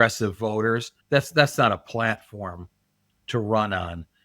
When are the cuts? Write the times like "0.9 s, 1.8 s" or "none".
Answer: 0.9 s